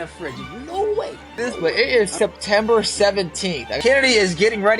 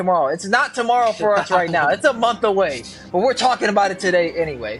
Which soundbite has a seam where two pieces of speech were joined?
first; 2 cuts; at 1.7 s, 3.7 s

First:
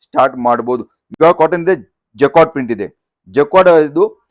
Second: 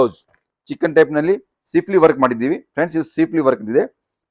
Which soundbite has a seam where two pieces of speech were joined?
first; 1 cut; at 1.0 s

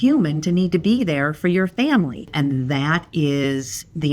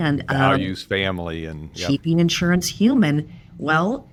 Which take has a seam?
first; 1 cut; at 2.3 s

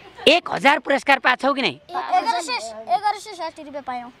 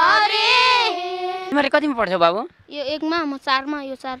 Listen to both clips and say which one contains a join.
second; 1 cut; at 1.4 s

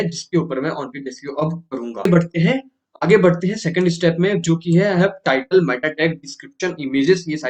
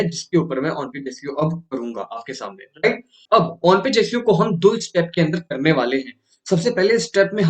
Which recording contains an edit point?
first; 1 cut; at 2.1 s

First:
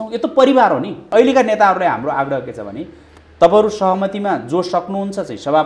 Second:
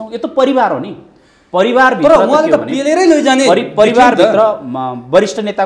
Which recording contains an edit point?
first; 1 cut; at 1.0 s

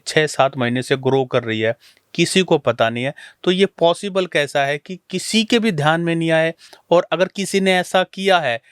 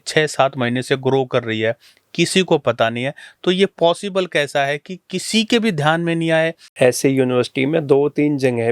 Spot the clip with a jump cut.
second; 1 cut; at 6.6 s

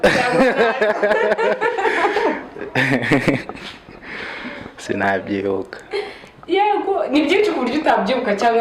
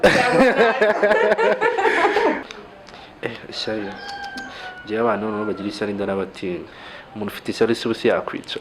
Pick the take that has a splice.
second; 2 cuts; at 2.7 s, 6.7 s

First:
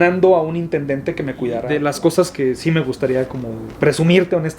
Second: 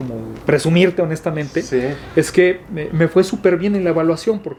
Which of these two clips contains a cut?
first; 1 cut; at 1.7 s

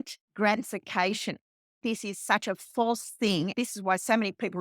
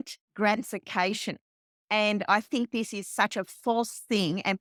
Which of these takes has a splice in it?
first; 2 cuts; at 1.8 s, 3.5 s

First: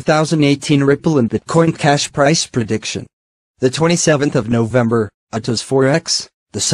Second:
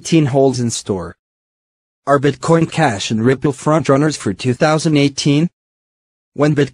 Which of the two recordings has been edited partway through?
first; 1 cut; at 4.9 s

